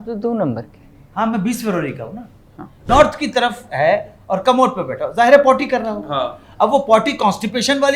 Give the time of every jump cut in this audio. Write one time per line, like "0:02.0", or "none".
0:02.8

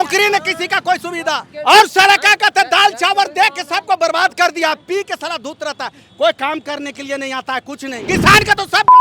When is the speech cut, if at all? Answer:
0:01.5
0:07.9

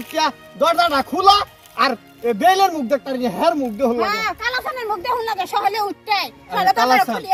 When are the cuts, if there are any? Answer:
none

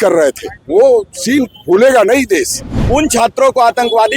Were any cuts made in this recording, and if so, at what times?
0:02.7

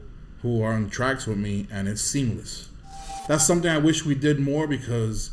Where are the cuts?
0:03.2

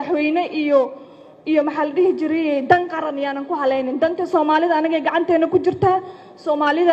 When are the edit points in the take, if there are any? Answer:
none

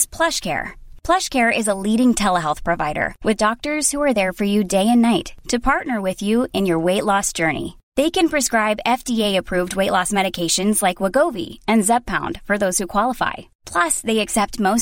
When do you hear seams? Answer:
none

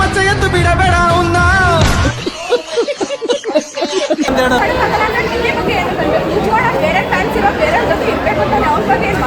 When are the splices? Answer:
0:04.6

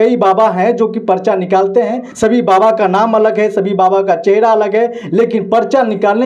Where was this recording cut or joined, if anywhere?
0:02.0

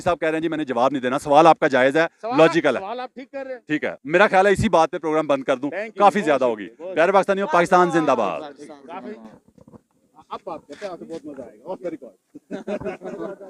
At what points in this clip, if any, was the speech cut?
none

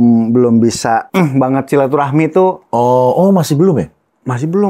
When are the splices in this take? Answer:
0:01.1

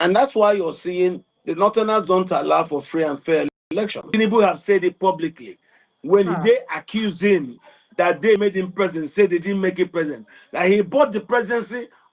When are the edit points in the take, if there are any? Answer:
0:04.0

